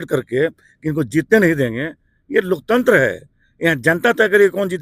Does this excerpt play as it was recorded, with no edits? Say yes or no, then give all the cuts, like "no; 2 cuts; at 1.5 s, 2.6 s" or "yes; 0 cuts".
yes; 0 cuts